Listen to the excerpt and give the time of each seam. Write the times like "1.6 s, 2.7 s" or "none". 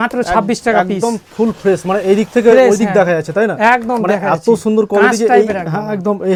none